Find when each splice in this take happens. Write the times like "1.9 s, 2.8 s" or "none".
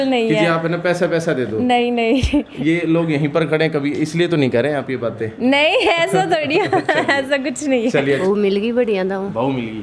8.2 s